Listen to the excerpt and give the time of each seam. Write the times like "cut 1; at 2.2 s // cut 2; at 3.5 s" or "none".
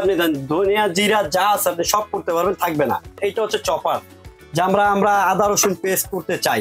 cut 1; at 3.2 s